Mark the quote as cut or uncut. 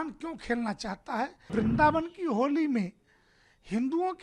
cut